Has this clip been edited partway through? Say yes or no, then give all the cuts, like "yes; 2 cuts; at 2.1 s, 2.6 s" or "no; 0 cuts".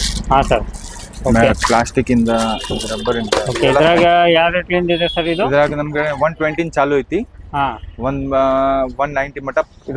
no; 0 cuts